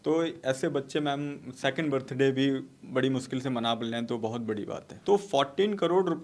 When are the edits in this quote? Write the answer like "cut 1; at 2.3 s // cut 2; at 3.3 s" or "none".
cut 1; at 4.9 s